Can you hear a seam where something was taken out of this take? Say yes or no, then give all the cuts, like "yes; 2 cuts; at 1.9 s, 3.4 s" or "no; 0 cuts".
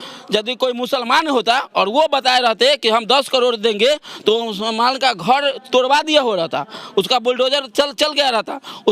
no; 0 cuts